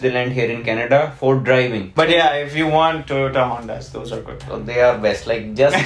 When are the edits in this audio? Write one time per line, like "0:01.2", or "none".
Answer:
0:01.9

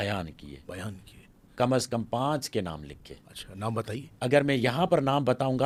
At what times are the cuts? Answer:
none

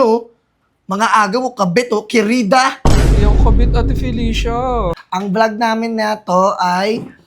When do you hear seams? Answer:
0:05.0

